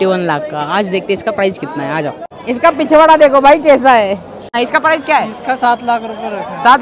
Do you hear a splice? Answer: yes; 2 cuts; at 2.1 s, 4.5 s

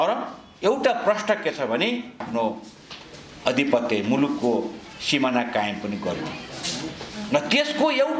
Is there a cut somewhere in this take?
yes; 1 cut; at 2.2 s

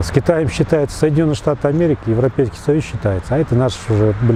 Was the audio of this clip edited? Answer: no; 0 cuts

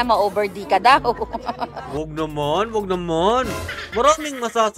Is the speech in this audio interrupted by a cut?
no; 0 cuts

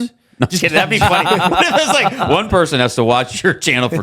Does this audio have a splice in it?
no; 0 cuts

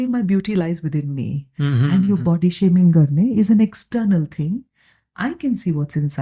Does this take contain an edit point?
no; 0 cuts

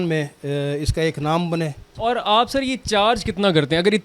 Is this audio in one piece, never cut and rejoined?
no; 1 cut; at 1.8 s

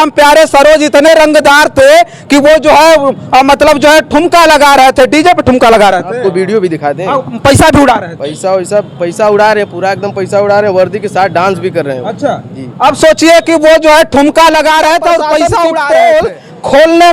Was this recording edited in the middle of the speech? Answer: yes; 1 cut; at 15.8 s

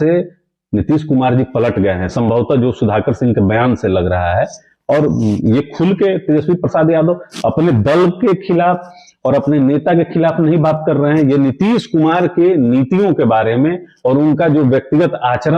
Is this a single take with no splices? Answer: yes; 0 cuts

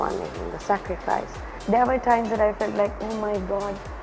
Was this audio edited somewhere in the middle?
yes; 1 cut; at 1.5 s

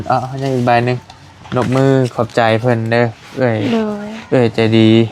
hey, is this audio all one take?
yes; 0 cuts

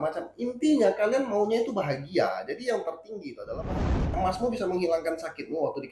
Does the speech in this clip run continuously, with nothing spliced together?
no; 1 cut; at 4.1 s

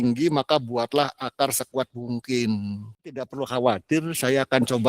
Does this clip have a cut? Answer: yes; 1 cut; at 3.1 s

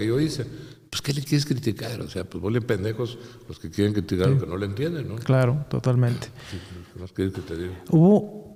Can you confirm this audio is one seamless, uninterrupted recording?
yes; 0 cuts

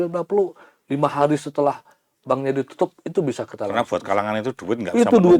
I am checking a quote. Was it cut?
no; 0 cuts

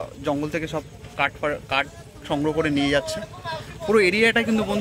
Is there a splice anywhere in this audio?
no; 0 cuts

